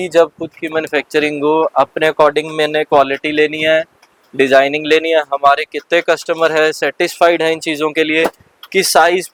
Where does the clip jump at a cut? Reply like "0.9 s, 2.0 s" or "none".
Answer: none